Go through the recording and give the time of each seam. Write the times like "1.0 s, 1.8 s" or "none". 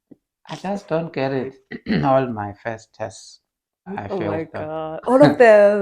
1.5 s, 3.9 s